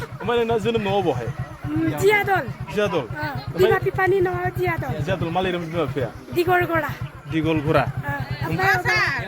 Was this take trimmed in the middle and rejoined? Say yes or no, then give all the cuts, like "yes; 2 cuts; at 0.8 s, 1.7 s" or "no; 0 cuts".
no; 0 cuts